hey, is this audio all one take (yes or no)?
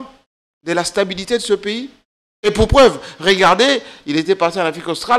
yes